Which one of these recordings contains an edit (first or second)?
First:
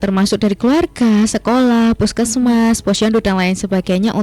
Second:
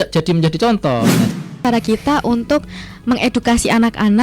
second